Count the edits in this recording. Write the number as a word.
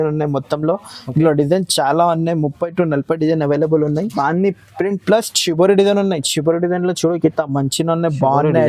one